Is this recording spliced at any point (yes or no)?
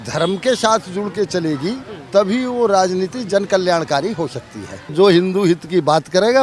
yes